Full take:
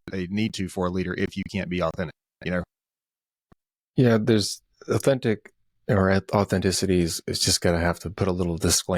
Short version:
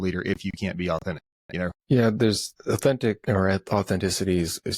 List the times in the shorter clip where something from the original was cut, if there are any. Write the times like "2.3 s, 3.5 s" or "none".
1.8 s, 2.5 s, 3.2 s